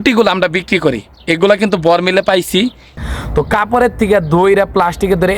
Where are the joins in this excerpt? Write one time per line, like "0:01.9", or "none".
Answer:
0:02.9